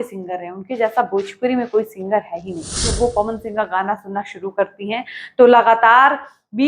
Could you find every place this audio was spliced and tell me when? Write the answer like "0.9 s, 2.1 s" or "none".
2.9 s